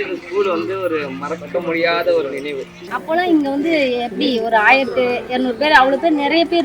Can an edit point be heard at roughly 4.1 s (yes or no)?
no